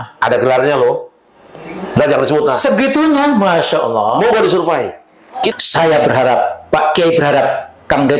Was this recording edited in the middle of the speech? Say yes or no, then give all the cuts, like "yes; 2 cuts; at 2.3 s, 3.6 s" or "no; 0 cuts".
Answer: yes; 1 cut; at 5.5 s